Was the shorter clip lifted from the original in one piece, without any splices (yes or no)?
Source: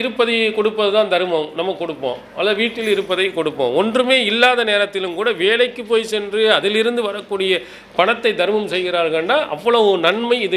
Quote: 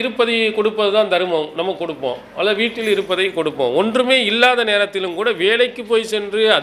yes